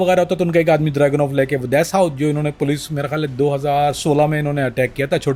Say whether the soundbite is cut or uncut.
uncut